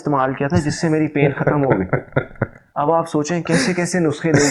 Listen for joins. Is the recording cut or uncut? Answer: uncut